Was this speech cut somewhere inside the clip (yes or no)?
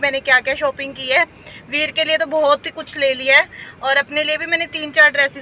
no